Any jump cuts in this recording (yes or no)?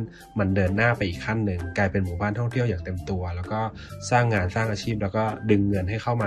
no